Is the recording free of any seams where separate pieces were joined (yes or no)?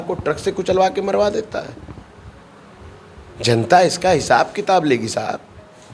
yes